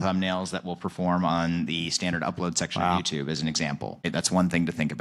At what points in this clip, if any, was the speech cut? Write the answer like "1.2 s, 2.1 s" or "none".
4.1 s

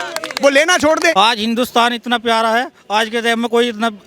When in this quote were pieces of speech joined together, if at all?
1.1 s

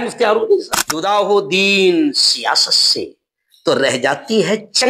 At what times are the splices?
1.0 s

